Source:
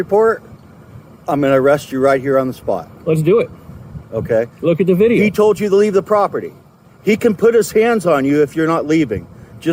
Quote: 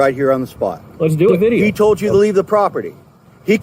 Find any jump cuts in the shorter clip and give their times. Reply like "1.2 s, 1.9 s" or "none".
1.3 s